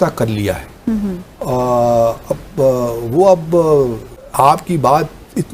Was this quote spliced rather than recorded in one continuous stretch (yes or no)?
no